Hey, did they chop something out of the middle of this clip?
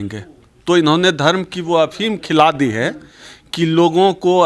no; 0 cuts

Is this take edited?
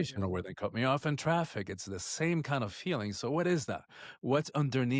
no; 0 cuts

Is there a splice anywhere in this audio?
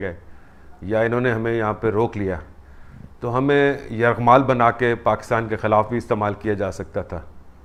no; 0 cuts

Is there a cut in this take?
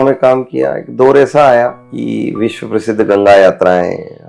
yes; 1 cut; at 1.9 s

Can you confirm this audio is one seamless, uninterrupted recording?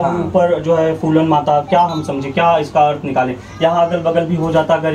yes; 0 cuts

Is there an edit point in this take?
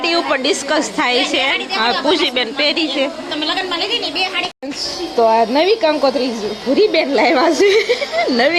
no; 0 cuts

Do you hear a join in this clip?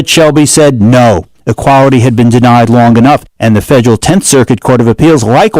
no; 0 cuts

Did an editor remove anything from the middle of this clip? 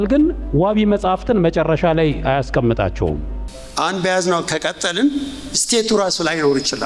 yes; 1 cut; at 3.3 s

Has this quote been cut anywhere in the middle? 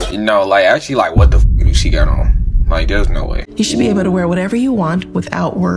yes; 1 cut; at 3.3 s

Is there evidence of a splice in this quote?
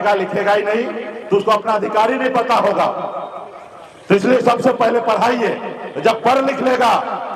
no; 0 cuts

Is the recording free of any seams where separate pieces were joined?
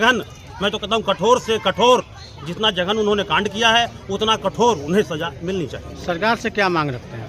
yes; 0 cuts

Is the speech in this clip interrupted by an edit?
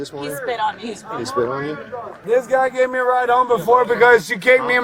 yes; 1 cut; at 2.1 s

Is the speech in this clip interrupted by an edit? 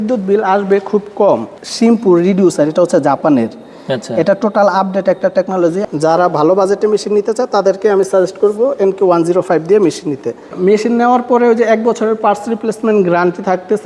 yes; 3 cuts; at 1.6 s, 5.8 s, 10.5 s

